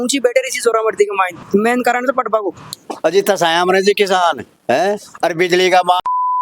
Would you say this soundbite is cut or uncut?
cut